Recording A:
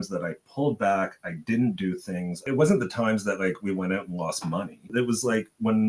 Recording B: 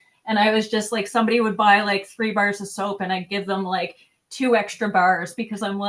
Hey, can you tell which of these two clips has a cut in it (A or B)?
A